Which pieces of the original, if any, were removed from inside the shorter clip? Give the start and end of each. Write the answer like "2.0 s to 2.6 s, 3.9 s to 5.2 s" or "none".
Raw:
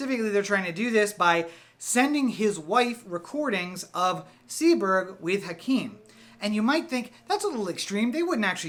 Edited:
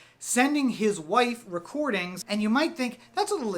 3.7 s to 6.3 s